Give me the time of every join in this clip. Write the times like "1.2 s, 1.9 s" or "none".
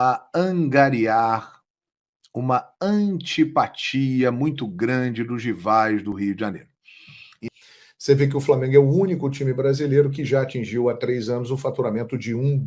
7.4 s